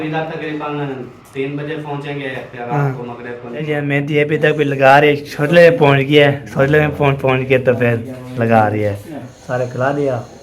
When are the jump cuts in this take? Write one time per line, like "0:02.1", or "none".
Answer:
0:03.6
0:09.3